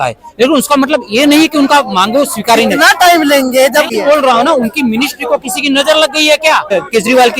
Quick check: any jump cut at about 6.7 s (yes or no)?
yes